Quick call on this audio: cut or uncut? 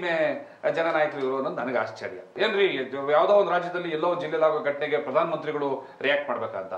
cut